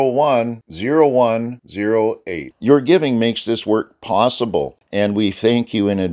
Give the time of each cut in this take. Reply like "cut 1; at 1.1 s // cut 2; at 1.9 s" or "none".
cut 1; at 4.8 s